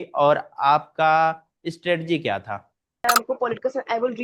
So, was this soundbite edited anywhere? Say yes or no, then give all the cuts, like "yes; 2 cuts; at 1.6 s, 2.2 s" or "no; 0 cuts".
yes; 1 cut; at 3.0 s